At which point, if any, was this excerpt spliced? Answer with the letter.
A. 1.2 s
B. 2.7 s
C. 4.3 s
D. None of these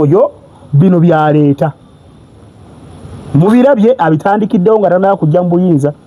D